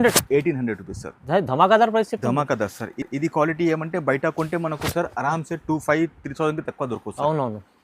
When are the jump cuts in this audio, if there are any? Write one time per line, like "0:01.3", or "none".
none